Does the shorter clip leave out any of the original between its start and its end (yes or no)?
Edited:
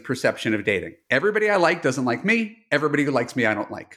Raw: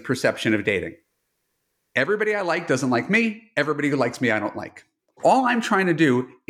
yes